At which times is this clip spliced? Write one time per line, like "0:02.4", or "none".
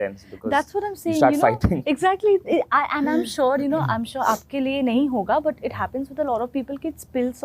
none